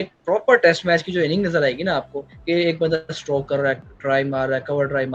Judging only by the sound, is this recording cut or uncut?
uncut